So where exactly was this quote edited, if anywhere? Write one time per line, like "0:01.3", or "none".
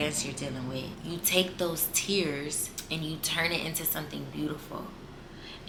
none